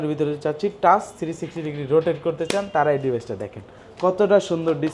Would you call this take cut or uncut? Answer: uncut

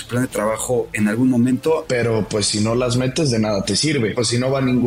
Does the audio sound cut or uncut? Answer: cut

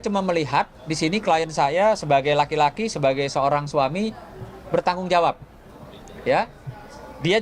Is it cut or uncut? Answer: uncut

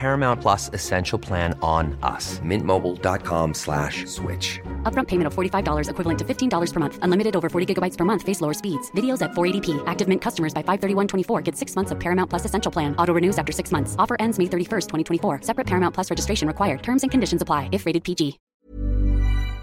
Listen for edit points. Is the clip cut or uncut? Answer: cut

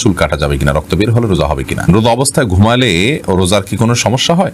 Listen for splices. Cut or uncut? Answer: cut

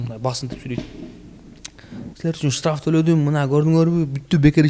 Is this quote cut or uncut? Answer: uncut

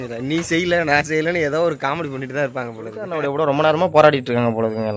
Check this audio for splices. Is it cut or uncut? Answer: cut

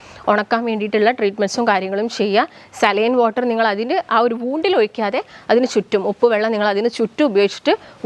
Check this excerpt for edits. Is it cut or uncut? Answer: uncut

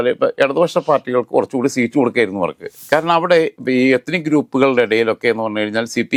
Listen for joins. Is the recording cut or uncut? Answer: uncut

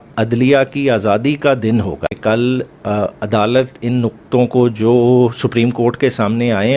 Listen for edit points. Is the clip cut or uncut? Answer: cut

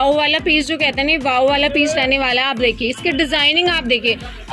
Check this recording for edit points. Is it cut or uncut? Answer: uncut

